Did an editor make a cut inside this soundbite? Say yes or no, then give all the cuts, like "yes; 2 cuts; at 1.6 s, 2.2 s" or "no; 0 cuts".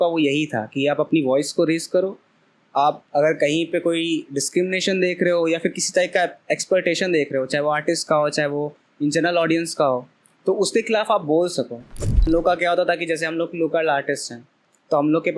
yes; 1 cut; at 12.2 s